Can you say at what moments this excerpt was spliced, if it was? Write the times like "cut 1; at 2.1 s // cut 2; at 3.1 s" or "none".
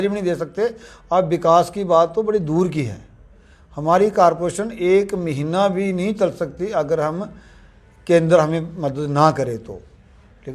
none

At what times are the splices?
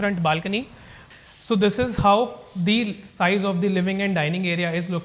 cut 1; at 1.0 s

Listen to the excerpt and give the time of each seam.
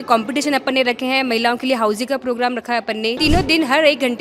cut 1; at 3.2 s

